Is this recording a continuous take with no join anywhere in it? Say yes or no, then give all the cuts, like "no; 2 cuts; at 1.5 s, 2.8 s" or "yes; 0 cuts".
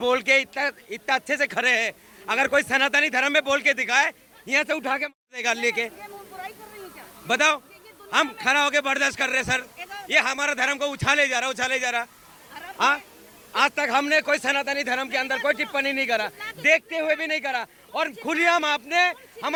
yes; 0 cuts